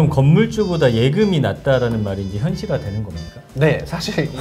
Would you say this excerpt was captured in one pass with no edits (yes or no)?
yes